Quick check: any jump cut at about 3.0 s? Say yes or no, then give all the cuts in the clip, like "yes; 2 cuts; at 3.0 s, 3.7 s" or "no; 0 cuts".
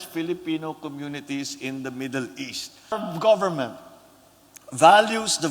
yes; 1 cut; at 3.0 s